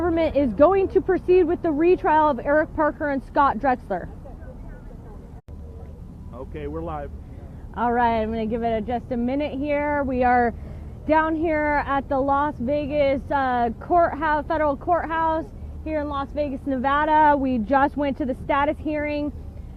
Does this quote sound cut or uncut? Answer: uncut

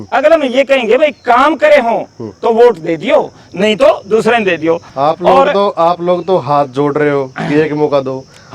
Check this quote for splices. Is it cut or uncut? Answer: cut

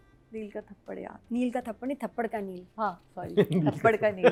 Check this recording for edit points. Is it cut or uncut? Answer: uncut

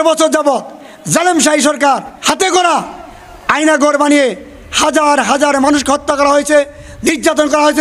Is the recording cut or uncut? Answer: cut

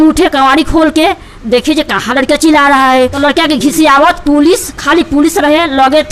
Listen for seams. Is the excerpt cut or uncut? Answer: cut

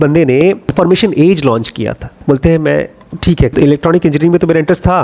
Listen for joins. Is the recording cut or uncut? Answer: cut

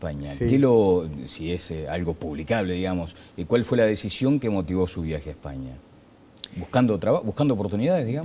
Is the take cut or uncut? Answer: uncut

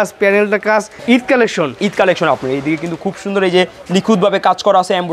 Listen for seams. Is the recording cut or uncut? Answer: cut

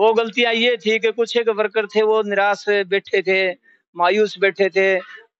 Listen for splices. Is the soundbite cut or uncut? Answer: uncut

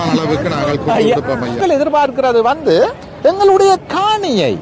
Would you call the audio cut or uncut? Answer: cut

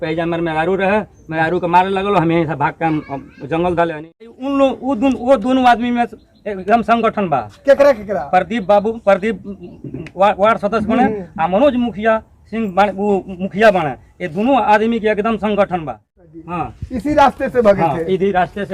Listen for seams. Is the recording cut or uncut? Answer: cut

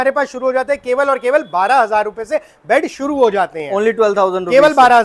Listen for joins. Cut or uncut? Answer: uncut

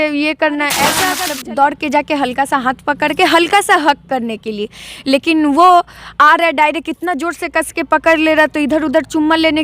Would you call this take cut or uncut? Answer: cut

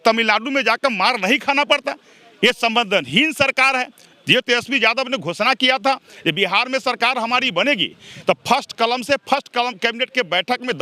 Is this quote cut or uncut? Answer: uncut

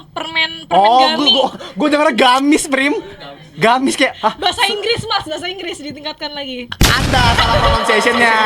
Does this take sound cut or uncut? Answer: uncut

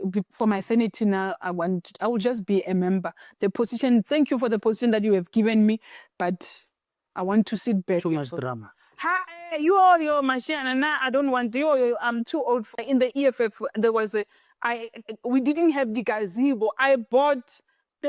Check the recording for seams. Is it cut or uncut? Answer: cut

